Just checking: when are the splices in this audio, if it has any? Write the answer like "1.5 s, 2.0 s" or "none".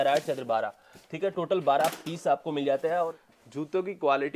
3.2 s